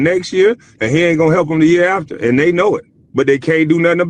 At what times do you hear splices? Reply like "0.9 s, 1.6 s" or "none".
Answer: 2.9 s